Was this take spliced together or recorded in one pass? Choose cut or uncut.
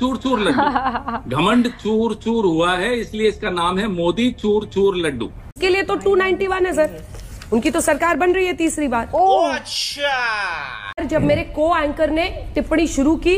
cut